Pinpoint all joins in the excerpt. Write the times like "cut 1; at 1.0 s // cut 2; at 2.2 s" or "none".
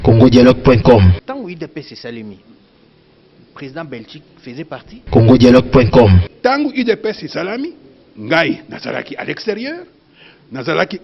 cut 1; at 1.2 s // cut 2; at 4.9 s // cut 3; at 6.3 s